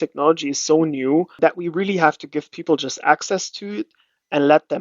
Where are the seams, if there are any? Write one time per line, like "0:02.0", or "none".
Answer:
0:01.3

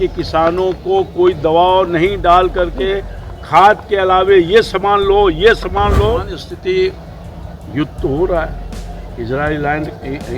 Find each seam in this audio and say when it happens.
0:06.4

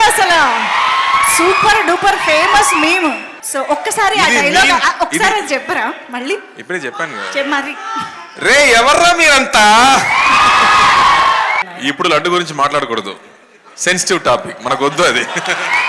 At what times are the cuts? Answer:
0:03.4
0:11.6

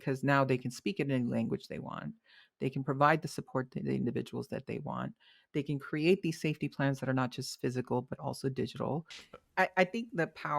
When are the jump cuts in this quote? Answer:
0:09.2

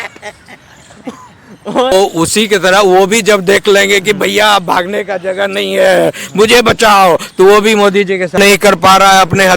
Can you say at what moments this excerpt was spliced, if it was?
0:01.9
0:08.4

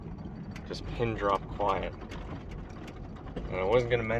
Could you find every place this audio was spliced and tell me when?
none

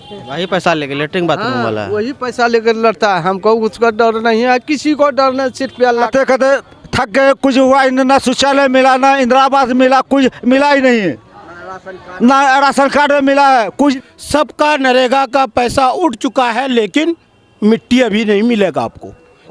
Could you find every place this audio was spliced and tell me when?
0:06.1
0:13.9

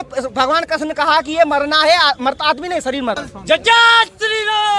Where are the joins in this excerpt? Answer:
0:03.3

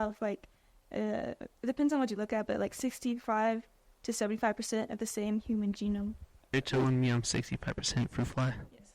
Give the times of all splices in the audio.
0:06.5

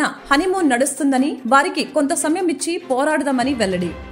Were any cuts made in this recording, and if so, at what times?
none

